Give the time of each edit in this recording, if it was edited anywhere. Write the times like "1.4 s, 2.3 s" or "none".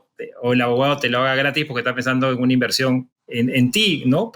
3.1 s